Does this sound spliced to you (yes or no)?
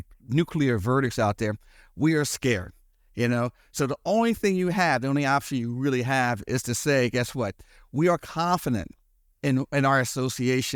no